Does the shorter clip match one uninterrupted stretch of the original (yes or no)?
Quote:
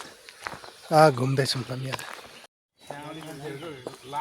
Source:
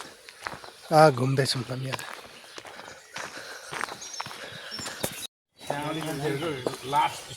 no